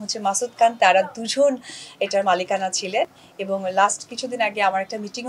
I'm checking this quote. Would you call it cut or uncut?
uncut